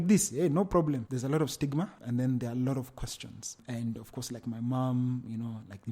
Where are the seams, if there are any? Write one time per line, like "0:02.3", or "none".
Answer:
0:01.1